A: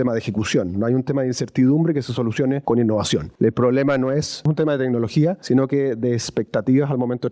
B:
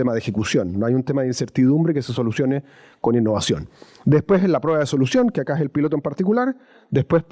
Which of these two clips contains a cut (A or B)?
A